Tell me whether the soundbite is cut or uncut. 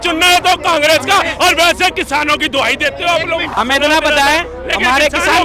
cut